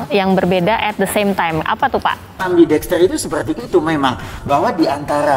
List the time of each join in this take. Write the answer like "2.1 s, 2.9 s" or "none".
2.4 s